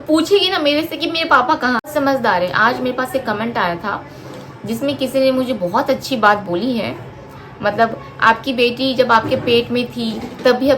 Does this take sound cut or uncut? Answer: cut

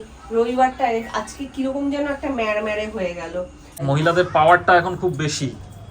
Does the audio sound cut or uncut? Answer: cut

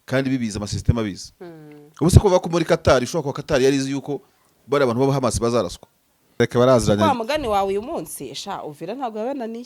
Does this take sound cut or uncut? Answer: cut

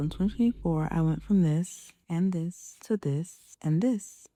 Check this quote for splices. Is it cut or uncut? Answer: uncut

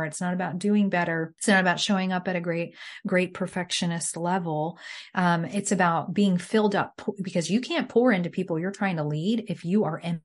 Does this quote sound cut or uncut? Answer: cut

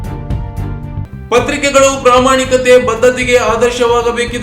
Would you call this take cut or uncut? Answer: uncut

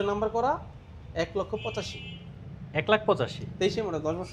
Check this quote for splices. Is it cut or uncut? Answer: uncut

